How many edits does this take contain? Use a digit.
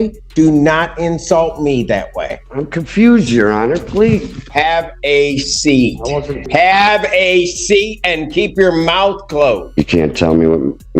4